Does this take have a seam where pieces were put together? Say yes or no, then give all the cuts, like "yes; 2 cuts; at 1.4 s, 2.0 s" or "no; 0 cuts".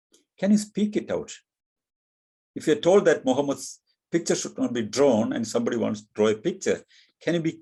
no; 0 cuts